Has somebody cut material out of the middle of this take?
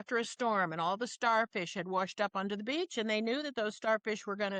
no; 0 cuts

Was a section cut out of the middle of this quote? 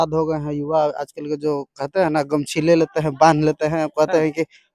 no; 0 cuts

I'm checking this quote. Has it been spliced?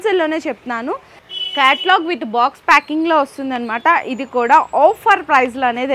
yes; 1 cut; at 1.2 s

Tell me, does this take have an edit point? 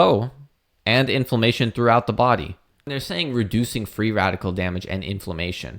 yes; 1 cut; at 2.9 s

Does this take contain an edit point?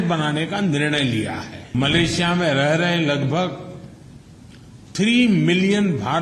yes; 1 cut; at 1.7 s

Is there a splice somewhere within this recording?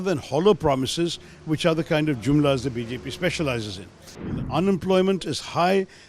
yes; 1 cut; at 4.4 s

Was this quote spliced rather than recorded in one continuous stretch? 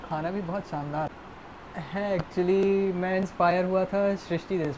yes; 1 cut; at 1.1 s

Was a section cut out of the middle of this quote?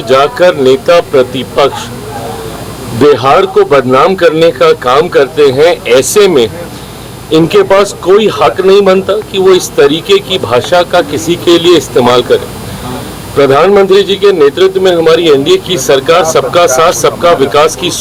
no; 0 cuts

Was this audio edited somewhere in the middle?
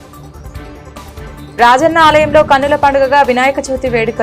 no; 0 cuts

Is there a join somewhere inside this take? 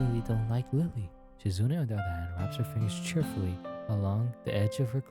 yes; 1 cut; at 1.0 s

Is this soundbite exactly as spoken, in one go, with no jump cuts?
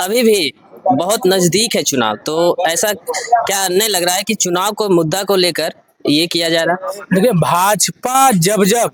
yes; 0 cuts

